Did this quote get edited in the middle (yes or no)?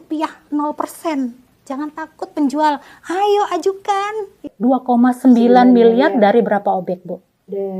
yes